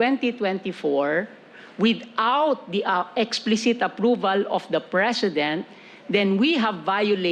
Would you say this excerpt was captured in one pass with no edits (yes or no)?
yes